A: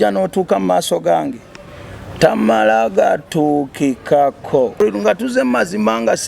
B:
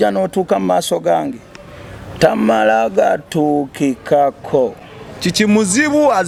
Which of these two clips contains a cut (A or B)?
A